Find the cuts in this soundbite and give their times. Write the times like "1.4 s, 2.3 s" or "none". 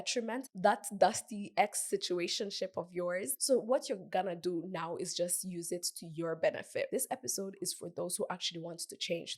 3.3 s, 6.9 s